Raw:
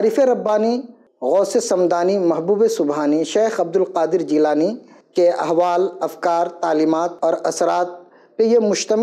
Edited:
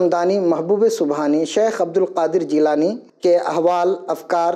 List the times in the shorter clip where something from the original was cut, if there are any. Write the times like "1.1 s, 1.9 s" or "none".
3.1 s